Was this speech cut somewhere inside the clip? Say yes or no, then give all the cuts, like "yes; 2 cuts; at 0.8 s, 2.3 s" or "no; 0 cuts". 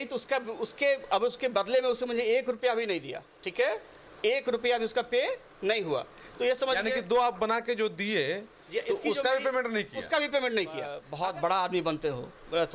yes; 1 cut; at 11.0 s